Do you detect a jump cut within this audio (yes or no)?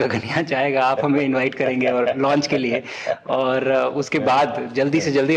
no